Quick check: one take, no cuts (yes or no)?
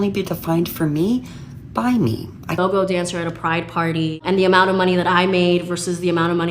no